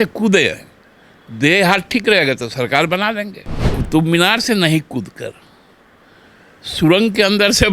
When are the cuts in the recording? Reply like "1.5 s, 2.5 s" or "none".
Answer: 3.7 s